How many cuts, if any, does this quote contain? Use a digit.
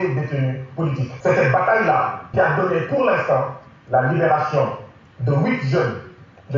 2